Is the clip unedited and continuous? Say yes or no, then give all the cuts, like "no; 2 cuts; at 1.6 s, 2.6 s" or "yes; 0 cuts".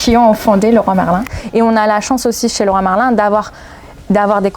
no; 1 cut; at 1.4 s